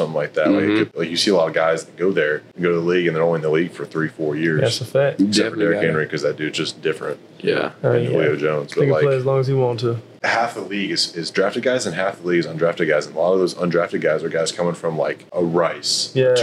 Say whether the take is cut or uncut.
cut